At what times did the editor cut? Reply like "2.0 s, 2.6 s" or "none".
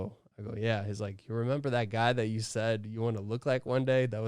none